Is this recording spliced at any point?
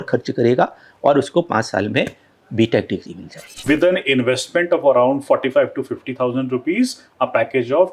yes; 1 cut; at 3.4 s

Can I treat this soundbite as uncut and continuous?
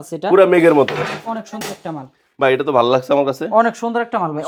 yes; 0 cuts

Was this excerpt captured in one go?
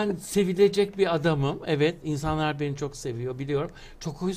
yes; 0 cuts

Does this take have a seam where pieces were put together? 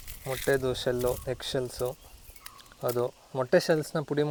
no; 0 cuts

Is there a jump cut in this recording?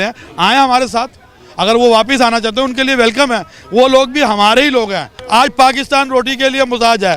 yes; 1 cut; at 5.1 s

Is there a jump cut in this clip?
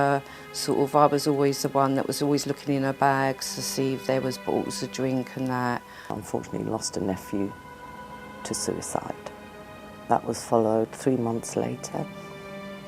yes; 1 cut; at 6.2 s

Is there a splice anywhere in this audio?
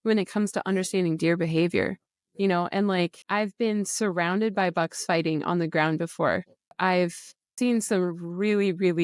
yes; 3 cuts; at 3.2 s, 6.7 s, 7.5 s

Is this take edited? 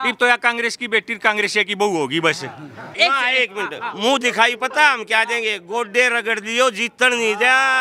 yes; 1 cut; at 2.9 s

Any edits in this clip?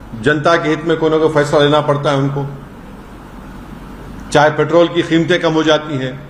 no; 0 cuts

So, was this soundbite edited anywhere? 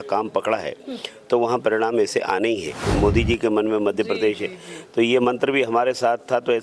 yes; 1 cut; at 2.8 s

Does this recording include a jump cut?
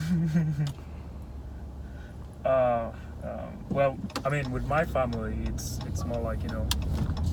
no; 0 cuts

